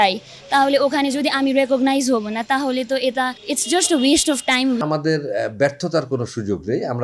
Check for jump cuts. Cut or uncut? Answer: cut